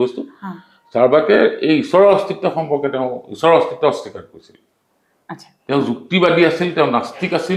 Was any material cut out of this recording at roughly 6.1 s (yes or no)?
no